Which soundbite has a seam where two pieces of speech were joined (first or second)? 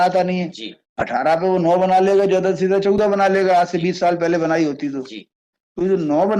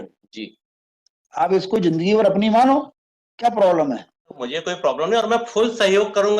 second